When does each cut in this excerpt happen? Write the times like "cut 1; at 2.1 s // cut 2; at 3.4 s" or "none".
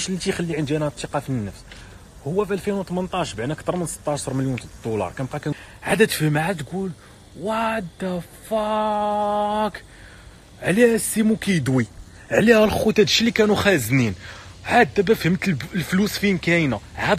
cut 1; at 5.5 s